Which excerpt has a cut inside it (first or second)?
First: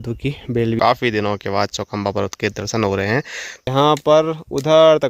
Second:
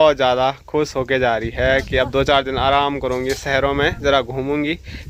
first